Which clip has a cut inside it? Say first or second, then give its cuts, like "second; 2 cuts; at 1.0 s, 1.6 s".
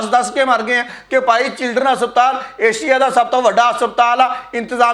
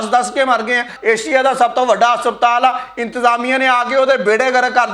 second; 1 cut; at 0.9 s